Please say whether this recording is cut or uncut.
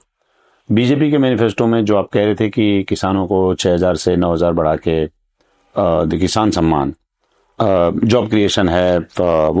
uncut